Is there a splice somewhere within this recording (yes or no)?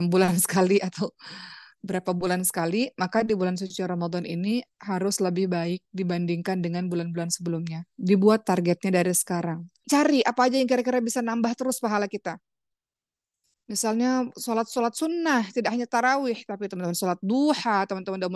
yes